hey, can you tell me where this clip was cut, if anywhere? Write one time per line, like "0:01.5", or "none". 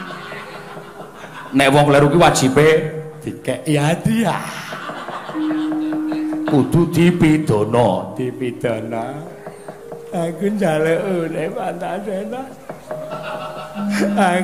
none